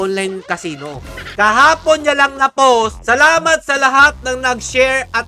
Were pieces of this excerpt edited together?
yes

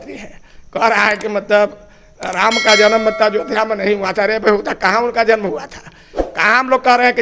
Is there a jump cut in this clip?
no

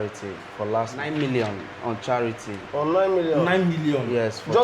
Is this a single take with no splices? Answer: no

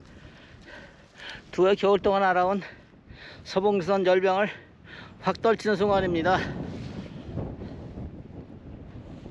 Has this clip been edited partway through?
no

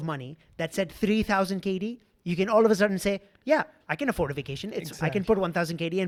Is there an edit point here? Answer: no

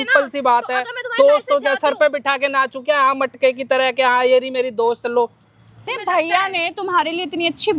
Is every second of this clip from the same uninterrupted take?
no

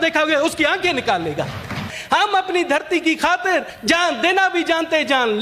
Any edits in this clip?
yes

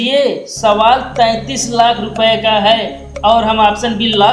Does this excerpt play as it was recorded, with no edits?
yes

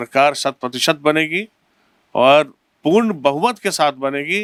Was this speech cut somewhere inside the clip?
no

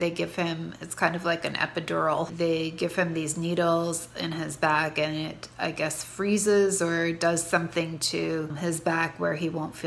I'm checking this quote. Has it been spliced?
yes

